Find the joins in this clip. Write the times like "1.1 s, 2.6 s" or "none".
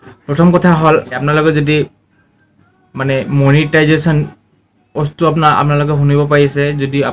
1.2 s